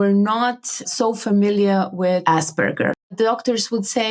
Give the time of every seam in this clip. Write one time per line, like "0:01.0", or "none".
0:03.0